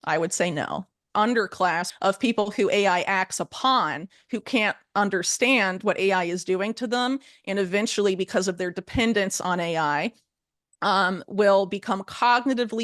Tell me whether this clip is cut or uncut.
cut